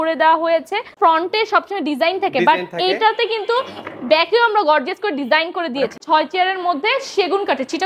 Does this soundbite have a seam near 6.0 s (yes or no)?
yes